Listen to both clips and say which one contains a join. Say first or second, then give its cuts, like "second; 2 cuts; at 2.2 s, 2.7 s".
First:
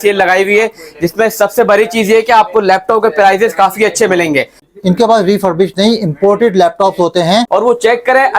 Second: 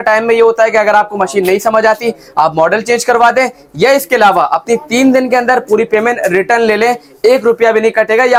first; 2 cuts; at 4.7 s, 7.5 s